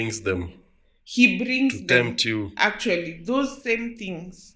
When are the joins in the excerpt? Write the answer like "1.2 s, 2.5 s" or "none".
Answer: none